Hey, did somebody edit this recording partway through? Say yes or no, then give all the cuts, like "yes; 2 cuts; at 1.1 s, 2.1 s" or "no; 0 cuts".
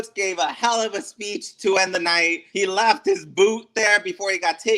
yes; 1 cut; at 2.4 s